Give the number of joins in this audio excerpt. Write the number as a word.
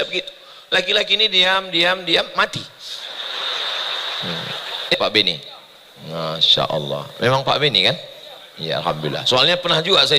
one